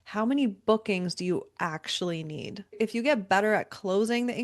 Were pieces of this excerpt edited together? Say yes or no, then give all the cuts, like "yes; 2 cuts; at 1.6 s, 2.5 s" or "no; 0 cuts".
yes; 1 cut; at 2.8 s